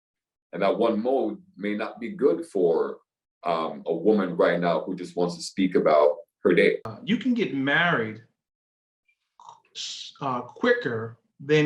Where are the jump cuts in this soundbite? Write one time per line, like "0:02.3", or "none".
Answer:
0:06.9